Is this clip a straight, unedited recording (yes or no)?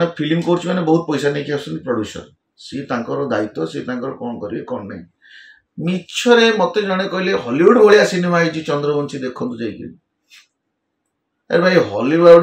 yes